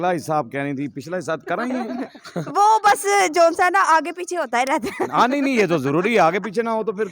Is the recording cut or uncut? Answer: uncut